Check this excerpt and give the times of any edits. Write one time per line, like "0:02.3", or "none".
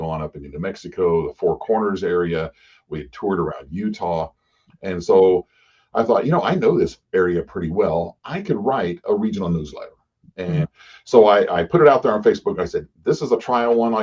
0:10.7

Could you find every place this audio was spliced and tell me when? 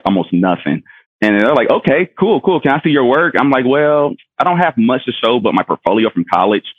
none

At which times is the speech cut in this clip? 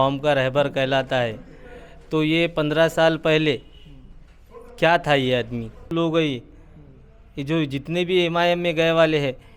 0:05.9

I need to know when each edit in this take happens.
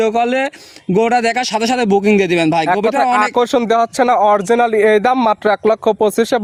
none

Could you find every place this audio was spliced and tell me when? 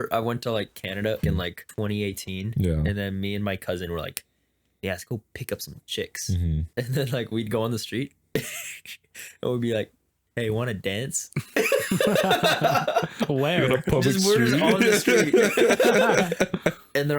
0:01.3
0:06.7

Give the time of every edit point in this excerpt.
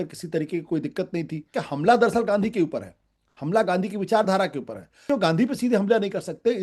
0:01.5
0:05.0

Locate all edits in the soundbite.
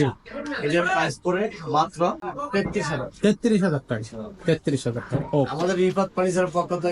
0:02.3

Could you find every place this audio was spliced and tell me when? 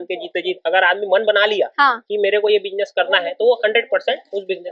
none

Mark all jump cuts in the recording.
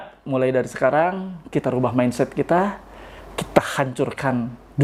none

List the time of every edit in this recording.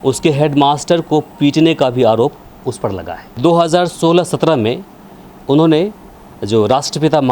0:03.3

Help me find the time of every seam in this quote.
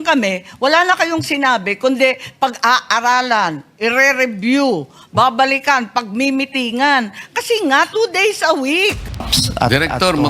0:09.4

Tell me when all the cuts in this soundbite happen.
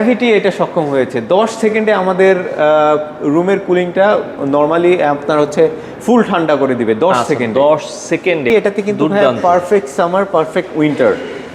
0:08.5

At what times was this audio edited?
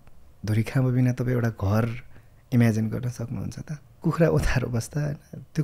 0:04.0

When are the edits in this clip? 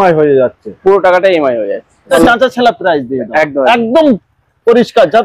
0:02.1

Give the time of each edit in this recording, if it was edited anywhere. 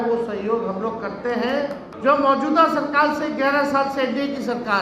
0:01.9

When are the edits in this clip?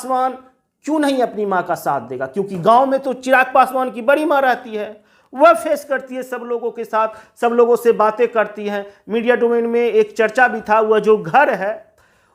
none

